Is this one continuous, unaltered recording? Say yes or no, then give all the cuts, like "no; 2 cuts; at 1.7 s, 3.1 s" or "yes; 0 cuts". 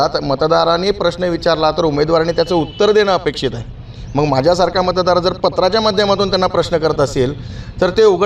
yes; 0 cuts